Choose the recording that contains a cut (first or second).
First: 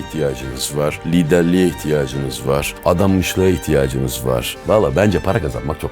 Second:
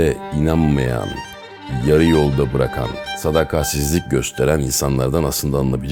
first